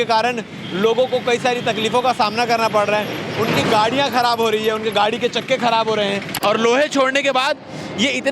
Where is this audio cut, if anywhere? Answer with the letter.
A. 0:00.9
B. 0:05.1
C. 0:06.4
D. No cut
C